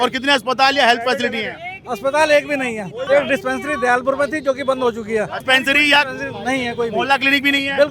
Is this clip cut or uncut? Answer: cut